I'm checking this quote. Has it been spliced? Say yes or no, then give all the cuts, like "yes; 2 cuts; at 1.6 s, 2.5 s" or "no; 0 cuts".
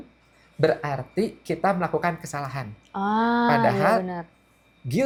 no; 0 cuts